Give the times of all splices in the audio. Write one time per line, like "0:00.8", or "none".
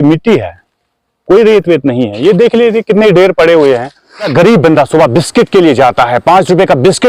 0:04.3